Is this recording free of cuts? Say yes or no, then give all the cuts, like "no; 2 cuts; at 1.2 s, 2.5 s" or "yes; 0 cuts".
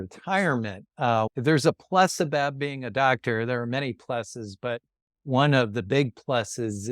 no; 1 cut; at 1.1 s